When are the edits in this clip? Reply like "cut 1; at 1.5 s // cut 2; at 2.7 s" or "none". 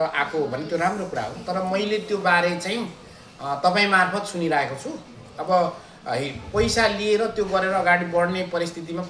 none